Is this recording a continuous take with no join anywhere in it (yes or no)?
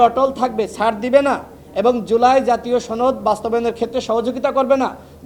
yes